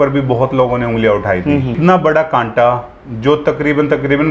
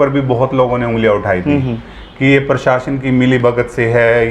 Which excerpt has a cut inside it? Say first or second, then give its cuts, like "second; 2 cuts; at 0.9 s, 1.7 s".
first; 1 cut; at 1.8 s